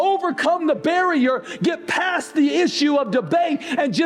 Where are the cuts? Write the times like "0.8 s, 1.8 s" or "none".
none